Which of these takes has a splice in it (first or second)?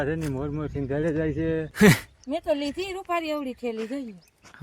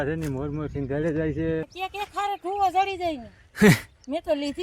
first